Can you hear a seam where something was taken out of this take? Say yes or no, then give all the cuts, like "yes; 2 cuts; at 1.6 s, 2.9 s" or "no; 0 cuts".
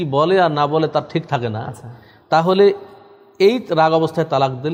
no; 0 cuts